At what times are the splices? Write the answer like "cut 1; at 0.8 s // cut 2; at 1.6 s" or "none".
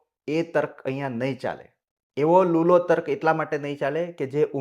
none